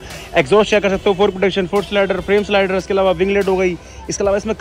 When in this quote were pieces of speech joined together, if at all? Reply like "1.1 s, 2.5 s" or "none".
none